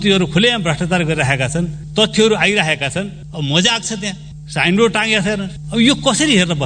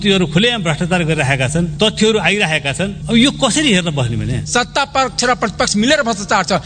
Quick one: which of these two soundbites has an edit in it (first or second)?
second